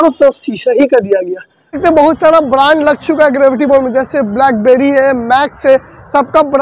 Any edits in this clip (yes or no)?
yes